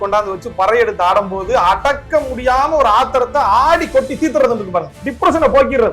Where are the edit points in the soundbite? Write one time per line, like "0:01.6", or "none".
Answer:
0:05.0